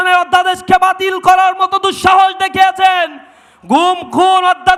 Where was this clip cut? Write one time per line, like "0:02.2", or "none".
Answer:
none